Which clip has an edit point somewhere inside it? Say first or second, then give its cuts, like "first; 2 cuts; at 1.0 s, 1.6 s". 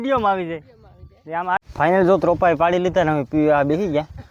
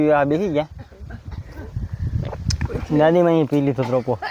first; 1 cut; at 1.6 s